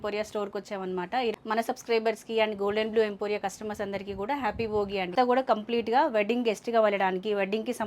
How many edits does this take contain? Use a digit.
2